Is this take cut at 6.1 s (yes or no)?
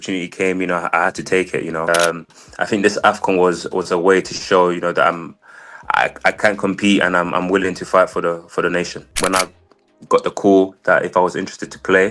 no